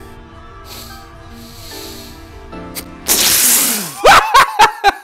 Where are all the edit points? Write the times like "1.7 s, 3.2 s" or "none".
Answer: none